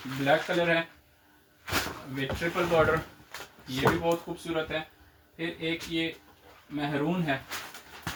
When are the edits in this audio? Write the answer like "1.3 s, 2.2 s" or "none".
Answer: none